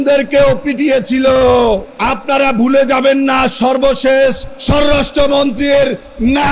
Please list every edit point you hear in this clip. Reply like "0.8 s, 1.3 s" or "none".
1.9 s, 4.5 s